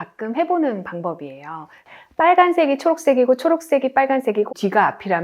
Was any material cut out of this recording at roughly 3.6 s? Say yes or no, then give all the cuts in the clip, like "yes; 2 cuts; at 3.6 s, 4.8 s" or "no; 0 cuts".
no; 1 cut; at 1.9 s